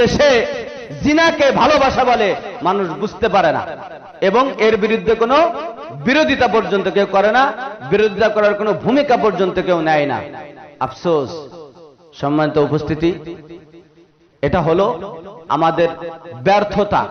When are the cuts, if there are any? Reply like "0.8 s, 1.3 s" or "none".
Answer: none